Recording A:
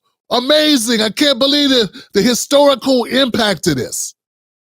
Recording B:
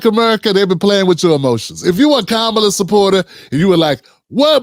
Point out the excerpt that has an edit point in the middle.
A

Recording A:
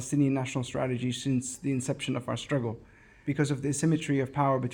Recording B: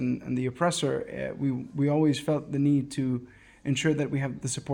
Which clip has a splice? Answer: A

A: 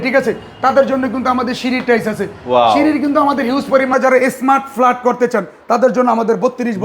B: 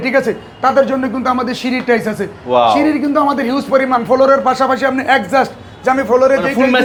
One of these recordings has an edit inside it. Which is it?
A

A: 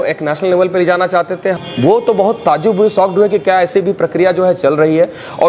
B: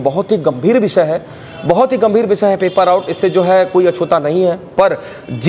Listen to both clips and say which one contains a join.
A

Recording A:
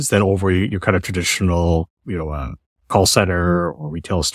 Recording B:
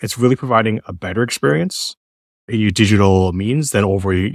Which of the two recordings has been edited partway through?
A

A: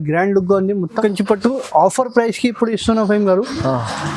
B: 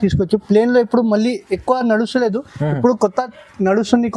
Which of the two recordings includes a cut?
A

